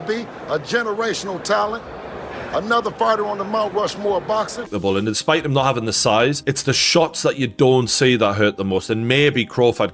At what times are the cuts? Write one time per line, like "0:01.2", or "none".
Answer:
0:04.7